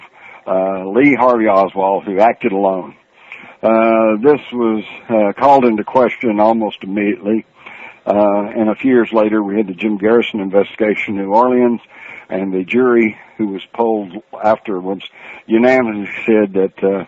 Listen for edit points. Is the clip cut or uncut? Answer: uncut